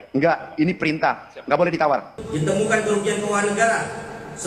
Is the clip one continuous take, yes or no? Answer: no